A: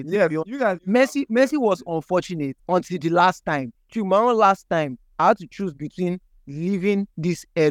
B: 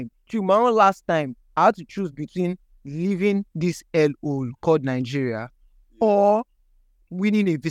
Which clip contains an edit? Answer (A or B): A